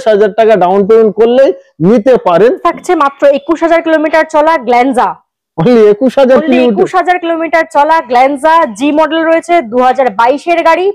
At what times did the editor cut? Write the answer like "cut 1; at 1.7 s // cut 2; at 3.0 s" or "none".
cut 1; at 2.7 s